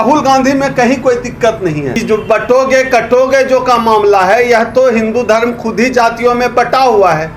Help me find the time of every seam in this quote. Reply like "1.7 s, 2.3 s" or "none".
2.0 s